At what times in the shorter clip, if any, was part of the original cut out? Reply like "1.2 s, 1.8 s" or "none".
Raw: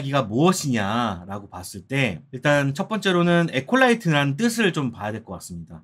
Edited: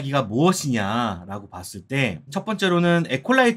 2.3 s